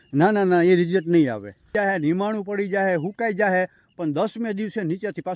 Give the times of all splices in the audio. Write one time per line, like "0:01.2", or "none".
0:01.7